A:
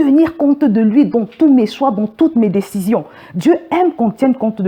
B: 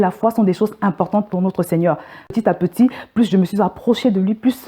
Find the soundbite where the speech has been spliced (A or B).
B